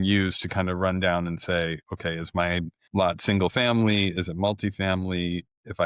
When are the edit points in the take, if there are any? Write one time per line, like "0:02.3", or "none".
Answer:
0:02.8